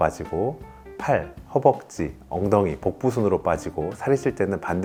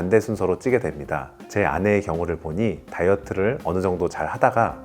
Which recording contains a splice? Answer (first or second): second